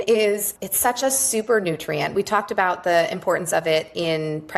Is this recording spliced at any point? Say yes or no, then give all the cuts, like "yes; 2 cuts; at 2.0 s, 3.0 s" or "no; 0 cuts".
no; 0 cuts